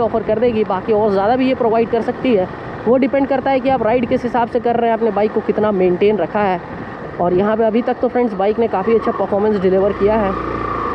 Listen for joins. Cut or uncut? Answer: uncut